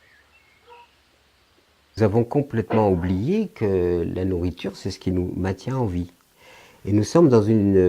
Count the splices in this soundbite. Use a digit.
1